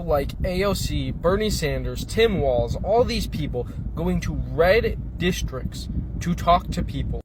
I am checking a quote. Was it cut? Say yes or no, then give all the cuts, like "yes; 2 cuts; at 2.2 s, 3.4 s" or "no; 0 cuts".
no; 0 cuts